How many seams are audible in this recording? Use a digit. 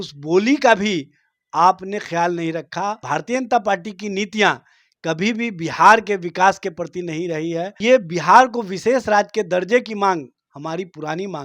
2